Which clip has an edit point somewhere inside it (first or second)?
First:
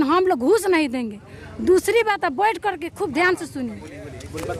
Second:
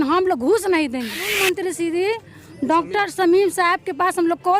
second